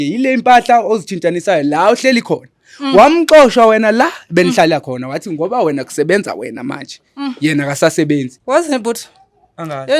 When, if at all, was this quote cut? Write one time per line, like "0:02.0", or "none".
0:08.3